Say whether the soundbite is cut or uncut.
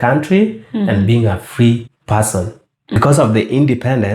cut